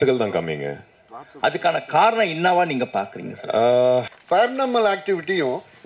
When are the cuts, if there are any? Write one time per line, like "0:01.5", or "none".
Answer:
0:04.1